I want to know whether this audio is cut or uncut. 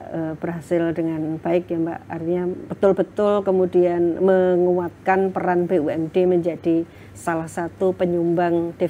uncut